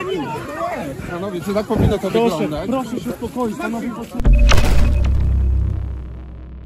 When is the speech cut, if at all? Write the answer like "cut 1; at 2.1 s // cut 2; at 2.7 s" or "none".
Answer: cut 1; at 4.2 s